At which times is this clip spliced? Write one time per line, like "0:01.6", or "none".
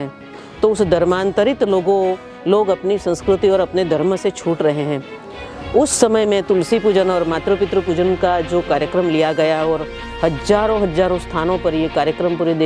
none